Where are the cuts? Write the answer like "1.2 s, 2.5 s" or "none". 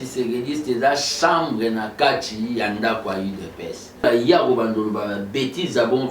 4.0 s